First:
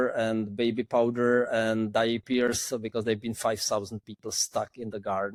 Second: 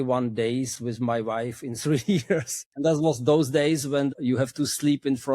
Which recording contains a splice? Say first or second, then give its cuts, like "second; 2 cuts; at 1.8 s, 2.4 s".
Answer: second; 2 cuts; at 2.6 s, 4.2 s